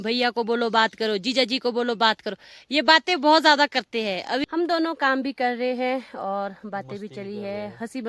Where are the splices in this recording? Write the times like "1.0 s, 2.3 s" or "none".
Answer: 4.4 s